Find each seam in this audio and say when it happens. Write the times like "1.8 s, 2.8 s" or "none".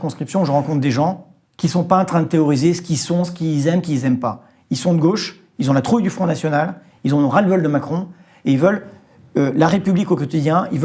none